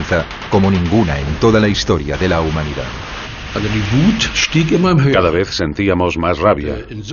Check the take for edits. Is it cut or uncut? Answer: uncut